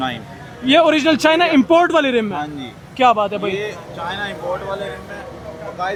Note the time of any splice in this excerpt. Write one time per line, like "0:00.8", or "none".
none